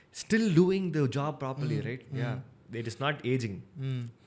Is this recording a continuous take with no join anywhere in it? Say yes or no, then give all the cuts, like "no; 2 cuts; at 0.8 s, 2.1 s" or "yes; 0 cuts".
yes; 0 cuts